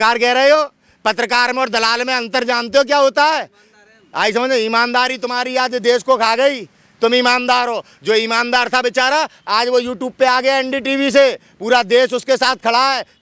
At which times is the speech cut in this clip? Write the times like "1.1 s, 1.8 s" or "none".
none